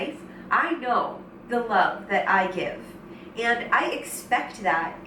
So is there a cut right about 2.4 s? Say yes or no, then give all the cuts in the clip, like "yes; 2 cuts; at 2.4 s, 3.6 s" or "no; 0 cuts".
no; 0 cuts